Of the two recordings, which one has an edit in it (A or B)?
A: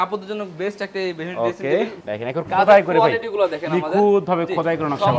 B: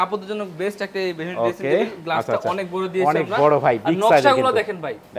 A